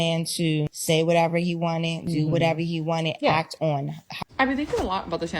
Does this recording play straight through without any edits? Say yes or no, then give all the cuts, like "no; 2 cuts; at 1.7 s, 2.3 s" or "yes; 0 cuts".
no; 1 cut; at 4.2 s